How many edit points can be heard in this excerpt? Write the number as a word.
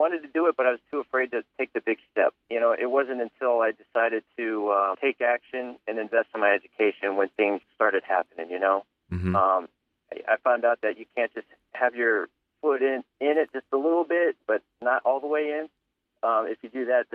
three